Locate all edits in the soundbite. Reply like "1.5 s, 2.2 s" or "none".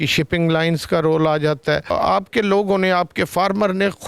1.9 s